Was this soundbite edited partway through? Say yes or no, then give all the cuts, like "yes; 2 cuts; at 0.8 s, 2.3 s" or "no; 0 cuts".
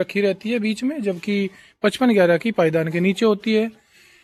no; 0 cuts